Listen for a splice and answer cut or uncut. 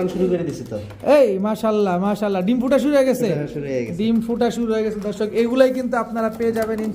uncut